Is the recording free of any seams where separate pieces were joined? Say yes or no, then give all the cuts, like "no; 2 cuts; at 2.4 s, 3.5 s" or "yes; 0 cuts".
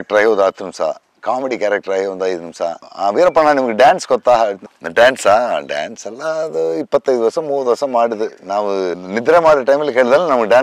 yes; 0 cuts